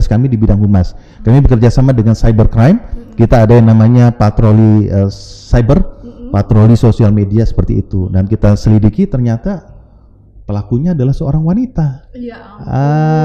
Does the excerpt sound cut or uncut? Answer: uncut